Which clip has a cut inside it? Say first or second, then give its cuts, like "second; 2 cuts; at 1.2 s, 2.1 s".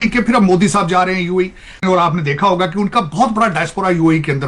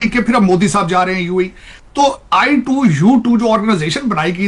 first; 1 cut; at 1.8 s